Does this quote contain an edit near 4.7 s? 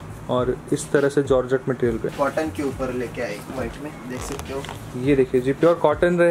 no; 1 cut; at 2.1 s

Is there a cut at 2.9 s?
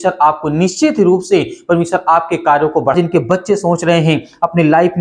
yes; 1 cut; at 2.9 s

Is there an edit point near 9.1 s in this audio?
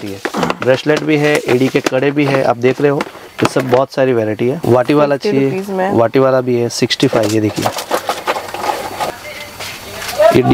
yes; 2 cuts; at 4.6 s, 9.1 s

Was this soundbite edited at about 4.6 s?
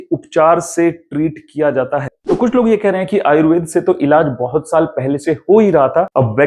no; 1 cut; at 2.1 s

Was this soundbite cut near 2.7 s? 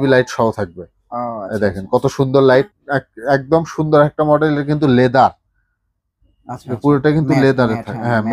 yes; 1 cut; at 2.7 s

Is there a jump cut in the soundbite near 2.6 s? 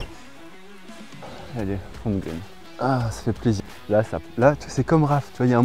yes; 3 cuts; at 1.3 s, 2.6 s, 3.6 s

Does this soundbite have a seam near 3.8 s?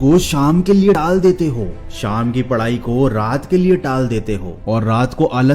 no; 1 cut; at 1.0 s

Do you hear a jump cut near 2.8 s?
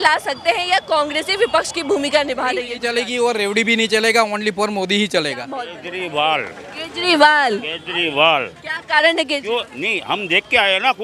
yes; 2 cuts; at 2.8 s, 5.8 s

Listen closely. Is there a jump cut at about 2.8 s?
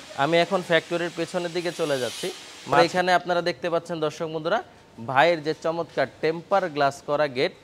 yes; 1 cut; at 2.8 s

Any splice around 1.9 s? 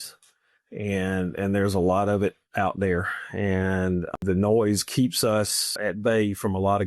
no; 2 cuts; at 4.2 s, 5.7 s

